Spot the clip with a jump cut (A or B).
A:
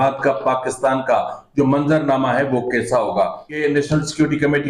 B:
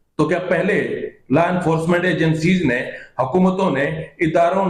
A